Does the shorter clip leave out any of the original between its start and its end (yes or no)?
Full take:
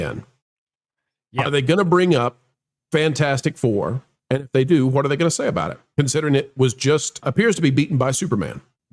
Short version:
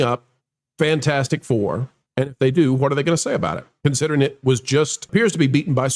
yes